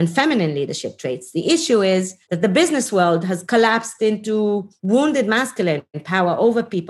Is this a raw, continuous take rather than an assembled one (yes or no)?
no